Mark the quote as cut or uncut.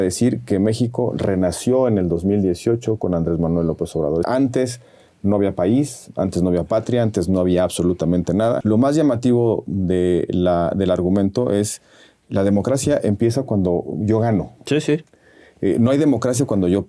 cut